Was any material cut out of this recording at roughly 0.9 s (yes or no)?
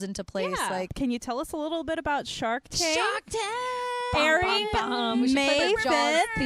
yes